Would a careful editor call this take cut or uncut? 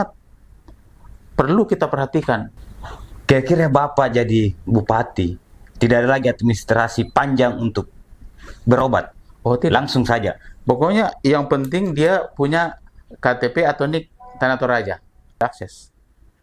cut